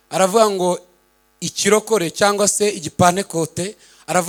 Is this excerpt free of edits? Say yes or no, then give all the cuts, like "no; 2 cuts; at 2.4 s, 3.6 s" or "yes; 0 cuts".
yes; 0 cuts